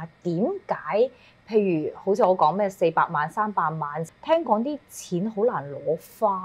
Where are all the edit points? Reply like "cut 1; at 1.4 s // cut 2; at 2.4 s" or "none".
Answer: cut 1; at 4.0 s

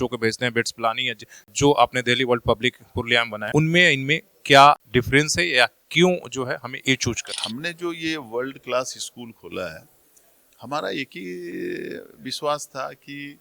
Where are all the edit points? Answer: cut 1; at 1.5 s // cut 2; at 3.4 s // cut 3; at 4.8 s // cut 4; at 7.3 s

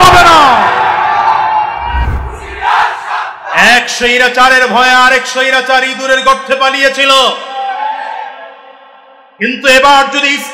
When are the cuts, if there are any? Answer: cut 1; at 2.0 s

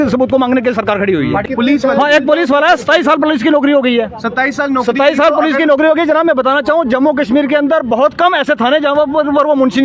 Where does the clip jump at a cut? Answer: none

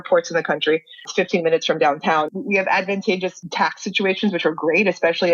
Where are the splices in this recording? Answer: cut 1; at 1.0 s // cut 2; at 2.3 s // cut 3; at 3.4 s

